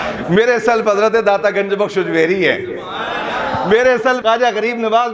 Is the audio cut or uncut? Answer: cut